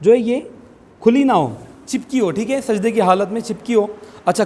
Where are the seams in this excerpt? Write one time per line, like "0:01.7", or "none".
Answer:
none